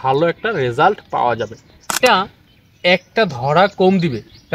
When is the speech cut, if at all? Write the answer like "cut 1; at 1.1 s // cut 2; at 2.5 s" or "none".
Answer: cut 1; at 2.0 s